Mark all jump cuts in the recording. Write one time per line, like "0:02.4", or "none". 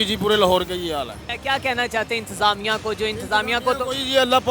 0:01.2

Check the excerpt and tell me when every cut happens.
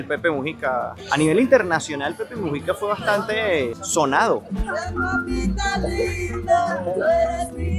0:01.0
0:04.5

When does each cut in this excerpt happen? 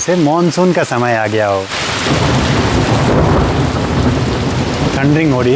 none

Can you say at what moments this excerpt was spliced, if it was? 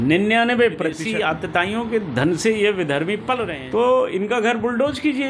0:01.0
0:03.5

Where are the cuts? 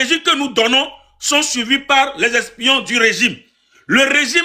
none

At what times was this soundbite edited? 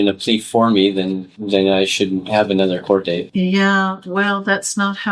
none

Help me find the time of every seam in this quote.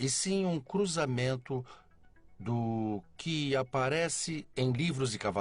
0:04.3

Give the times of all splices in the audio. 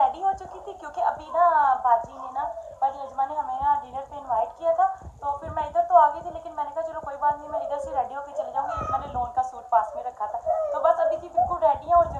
none

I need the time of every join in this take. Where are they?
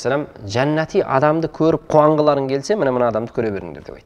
none

